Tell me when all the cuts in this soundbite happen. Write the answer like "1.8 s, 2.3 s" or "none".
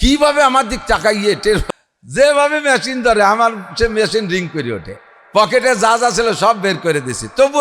1.6 s